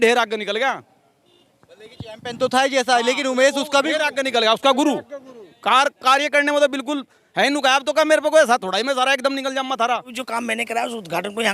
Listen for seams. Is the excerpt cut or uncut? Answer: cut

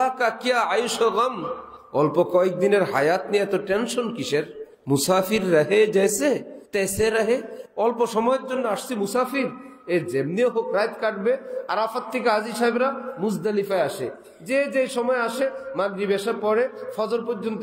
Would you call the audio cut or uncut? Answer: cut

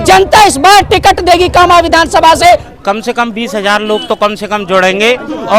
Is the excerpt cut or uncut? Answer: cut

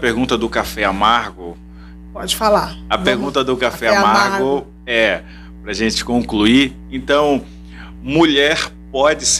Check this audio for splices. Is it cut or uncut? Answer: uncut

